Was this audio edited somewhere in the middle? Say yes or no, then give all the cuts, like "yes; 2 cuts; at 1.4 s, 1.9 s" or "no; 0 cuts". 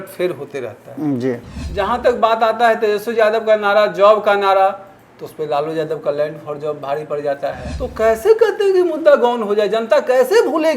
yes; 2 cuts; at 1.5 s, 7.7 s